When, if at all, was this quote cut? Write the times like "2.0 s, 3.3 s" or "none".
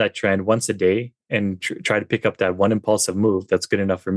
none